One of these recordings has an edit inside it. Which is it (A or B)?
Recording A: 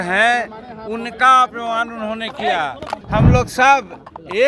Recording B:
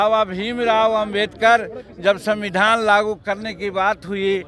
A